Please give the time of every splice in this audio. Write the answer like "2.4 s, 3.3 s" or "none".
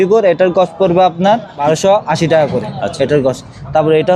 1.5 s